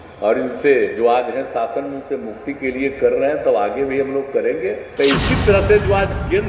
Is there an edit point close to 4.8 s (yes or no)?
yes